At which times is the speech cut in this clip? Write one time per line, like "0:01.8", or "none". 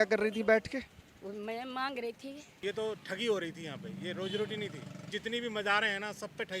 0:02.6
0:05.1

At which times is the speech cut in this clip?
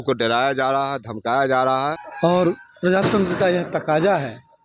0:02.1

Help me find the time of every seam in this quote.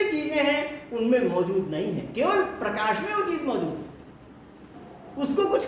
0:04.6

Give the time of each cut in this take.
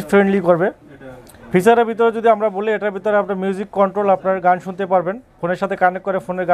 none

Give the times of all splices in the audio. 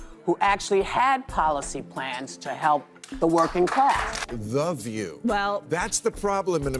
0:04.2

